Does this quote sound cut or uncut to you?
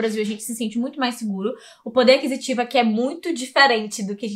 uncut